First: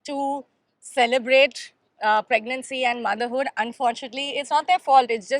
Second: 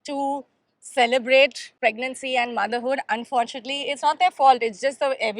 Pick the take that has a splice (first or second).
second